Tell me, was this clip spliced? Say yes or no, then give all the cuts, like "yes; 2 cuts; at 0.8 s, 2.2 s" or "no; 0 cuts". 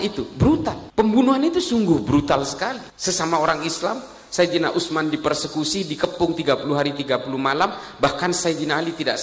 no; 0 cuts